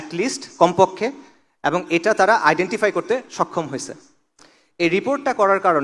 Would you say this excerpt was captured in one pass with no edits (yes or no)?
yes